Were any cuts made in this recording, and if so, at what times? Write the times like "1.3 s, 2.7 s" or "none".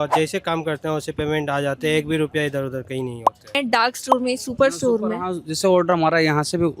3.5 s